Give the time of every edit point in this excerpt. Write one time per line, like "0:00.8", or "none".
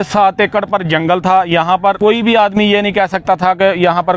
0:02.0

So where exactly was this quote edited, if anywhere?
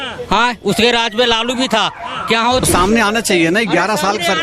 0:02.6

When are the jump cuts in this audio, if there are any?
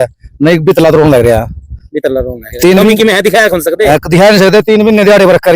none

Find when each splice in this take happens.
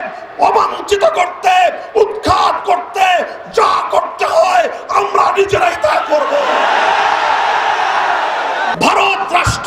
0:08.7

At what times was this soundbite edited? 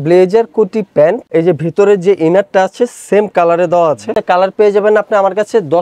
0:01.2
0:04.2

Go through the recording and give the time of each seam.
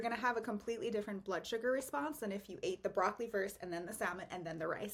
none

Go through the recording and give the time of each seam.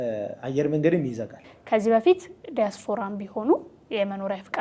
0:01.5

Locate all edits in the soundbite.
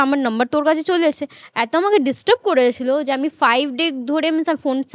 none

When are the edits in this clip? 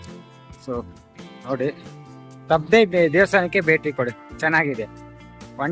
none

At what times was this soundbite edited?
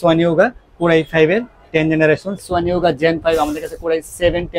0:02.4

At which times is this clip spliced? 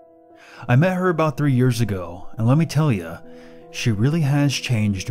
0:02.0

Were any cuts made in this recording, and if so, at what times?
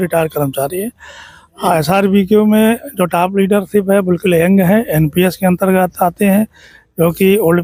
none

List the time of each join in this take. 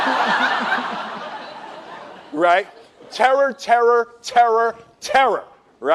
none

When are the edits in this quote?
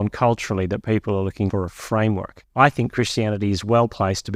0:01.5
0:02.4

